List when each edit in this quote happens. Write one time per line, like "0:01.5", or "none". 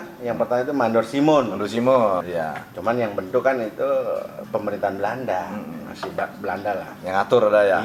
0:02.3